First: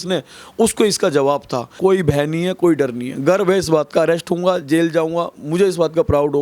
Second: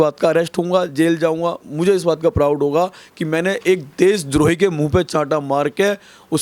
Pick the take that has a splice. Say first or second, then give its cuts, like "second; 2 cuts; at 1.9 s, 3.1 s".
first; 1 cut; at 1.7 s